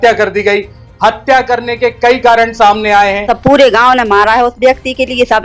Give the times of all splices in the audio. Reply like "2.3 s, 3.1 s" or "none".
3.2 s